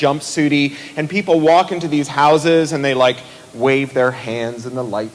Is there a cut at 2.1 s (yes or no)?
yes